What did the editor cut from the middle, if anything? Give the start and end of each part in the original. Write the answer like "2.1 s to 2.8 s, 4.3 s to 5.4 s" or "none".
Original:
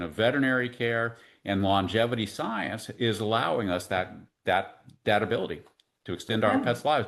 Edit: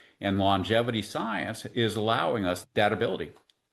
3.8 s to 4.9 s